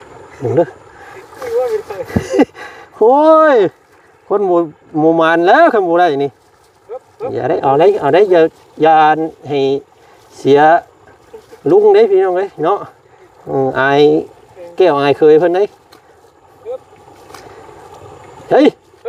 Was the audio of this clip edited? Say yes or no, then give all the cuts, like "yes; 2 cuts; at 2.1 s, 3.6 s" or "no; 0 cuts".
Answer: no; 0 cuts